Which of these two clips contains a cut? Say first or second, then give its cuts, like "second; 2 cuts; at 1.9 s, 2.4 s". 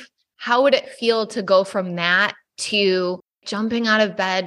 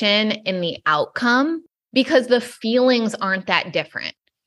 second; 1 cut; at 1.7 s